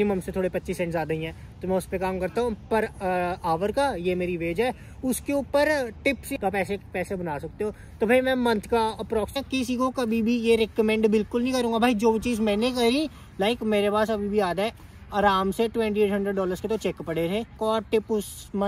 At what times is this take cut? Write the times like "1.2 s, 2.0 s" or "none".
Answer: 6.2 s, 9.3 s, 13.2 s, 17.5 s